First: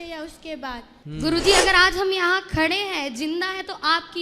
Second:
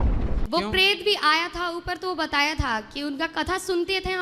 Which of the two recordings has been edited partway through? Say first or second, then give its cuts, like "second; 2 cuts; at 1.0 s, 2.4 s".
first; 1 cut; at 0.9 s